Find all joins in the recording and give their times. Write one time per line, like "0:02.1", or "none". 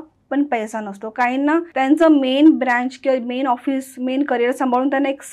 0:01.7

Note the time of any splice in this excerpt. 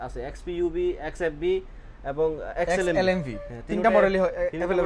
none

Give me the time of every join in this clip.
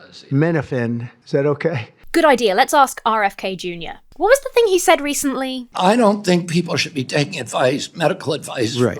0:01.1
0:01.9

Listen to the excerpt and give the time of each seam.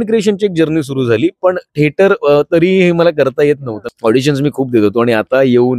0:03.8

